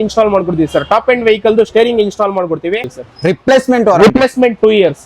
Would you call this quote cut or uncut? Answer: cut